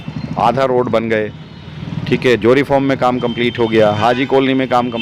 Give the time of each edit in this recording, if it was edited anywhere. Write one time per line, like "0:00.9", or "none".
none